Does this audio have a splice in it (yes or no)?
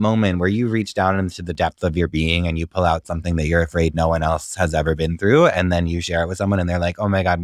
no